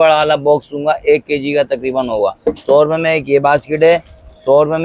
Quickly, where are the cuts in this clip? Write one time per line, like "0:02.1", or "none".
none